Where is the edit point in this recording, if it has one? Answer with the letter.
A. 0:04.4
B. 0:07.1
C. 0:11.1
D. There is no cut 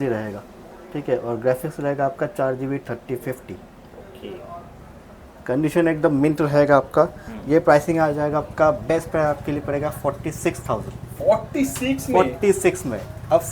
D